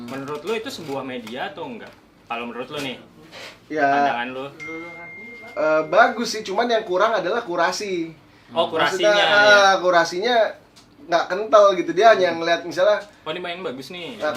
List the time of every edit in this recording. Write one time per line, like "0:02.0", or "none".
none